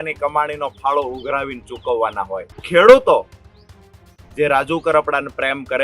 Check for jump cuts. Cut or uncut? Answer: cut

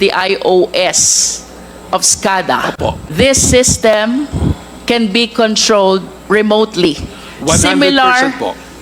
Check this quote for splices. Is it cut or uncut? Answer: cut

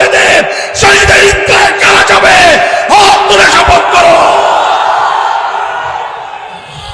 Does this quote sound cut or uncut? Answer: uncut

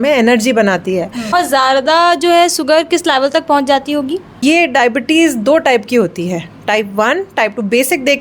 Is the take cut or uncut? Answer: cut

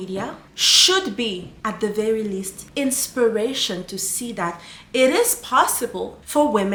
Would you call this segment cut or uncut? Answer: uncut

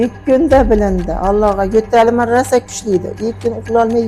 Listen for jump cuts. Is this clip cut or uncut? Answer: uncut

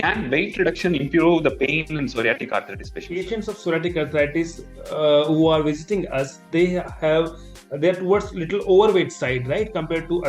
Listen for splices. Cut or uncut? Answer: cut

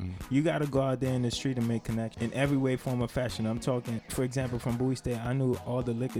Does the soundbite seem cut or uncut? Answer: cut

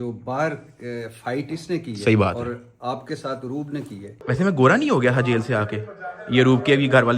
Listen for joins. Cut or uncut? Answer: cut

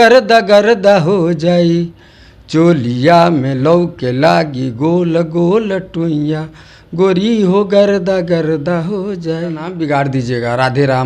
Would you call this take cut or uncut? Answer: cut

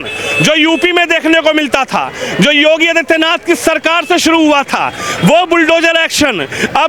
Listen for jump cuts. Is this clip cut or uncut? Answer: uncut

